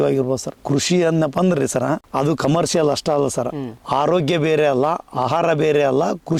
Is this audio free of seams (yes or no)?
yes